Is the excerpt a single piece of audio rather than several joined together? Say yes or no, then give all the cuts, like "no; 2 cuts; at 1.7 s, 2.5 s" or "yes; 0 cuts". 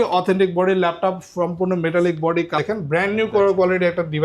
no; 1 cut; at 2.6 s